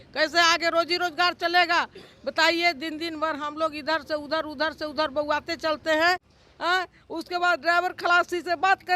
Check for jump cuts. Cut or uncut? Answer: cut